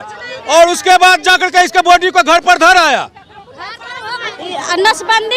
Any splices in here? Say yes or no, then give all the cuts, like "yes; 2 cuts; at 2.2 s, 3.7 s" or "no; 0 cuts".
yes; 1 cut; at 4.3 s